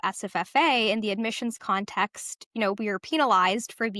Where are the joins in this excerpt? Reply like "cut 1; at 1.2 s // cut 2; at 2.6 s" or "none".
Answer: none